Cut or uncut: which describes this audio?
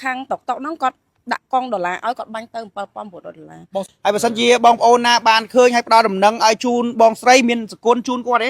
cut